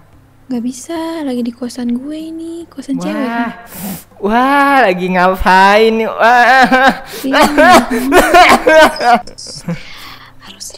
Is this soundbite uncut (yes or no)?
no